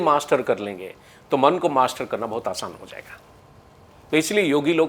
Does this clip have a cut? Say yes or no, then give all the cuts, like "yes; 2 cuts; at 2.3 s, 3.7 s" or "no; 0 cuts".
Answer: no; 0 cuts